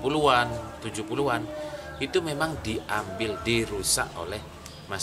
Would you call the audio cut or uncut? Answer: uncut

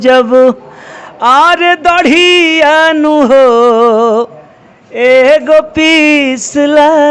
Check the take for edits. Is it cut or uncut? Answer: uncut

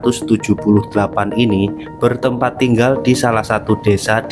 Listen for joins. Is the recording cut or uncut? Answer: uncut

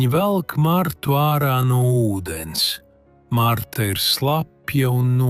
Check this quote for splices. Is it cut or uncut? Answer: uncut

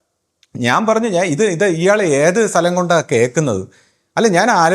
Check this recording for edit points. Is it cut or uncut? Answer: uncut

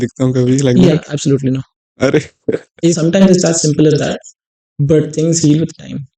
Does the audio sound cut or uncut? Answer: cut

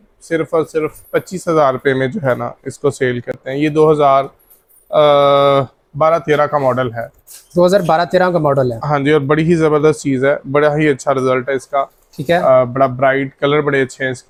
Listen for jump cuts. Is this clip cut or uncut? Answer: uncut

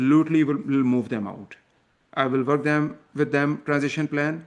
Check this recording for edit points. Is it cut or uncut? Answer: uncut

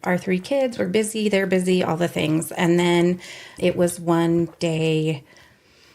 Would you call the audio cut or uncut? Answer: cut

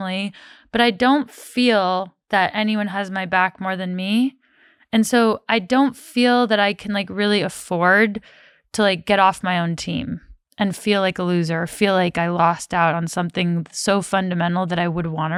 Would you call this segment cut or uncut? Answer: uncut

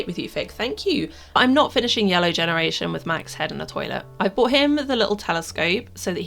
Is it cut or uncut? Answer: cut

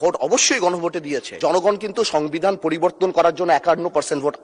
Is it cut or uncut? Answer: cut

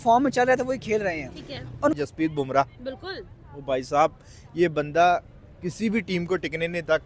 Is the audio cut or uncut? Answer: cut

